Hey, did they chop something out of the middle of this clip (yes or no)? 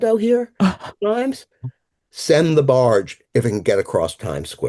yes